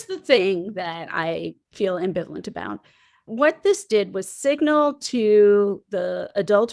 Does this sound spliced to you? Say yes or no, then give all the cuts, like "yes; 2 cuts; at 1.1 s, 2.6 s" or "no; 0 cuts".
no; 0 cuts